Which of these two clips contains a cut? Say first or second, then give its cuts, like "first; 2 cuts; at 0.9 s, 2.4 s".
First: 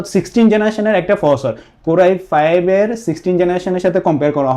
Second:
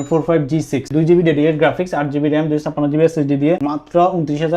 second; 1 cut; at 3.6 s